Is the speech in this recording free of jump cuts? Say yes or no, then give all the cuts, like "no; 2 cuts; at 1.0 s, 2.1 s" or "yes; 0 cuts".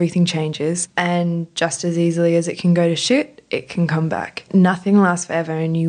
no; 2 cuts; at 0.9 s, 4.5 s